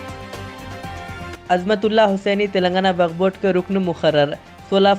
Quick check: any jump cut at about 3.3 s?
no; 1 cut; at 1.4 s

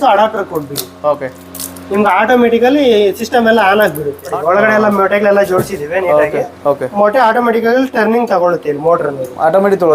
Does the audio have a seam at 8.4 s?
no; 1 cut; at 4.3 s

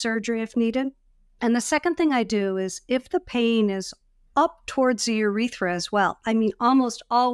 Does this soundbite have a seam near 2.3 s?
no; 0 cuts

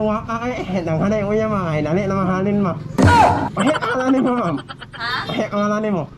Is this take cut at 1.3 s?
no; 2 cuts; at 2.9 s, 3.5 s

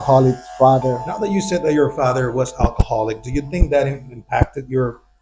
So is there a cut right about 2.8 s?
no; 1 cut; at 1.1 s

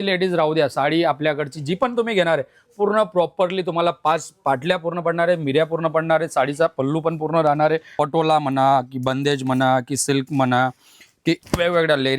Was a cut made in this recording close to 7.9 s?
yes; 1 cut; at 7.9 s

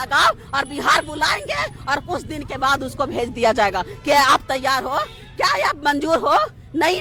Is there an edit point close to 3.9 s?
no; 0 cuts

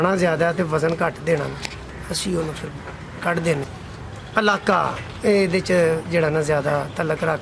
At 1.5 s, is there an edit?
no; 1 cut; at 3.8 s

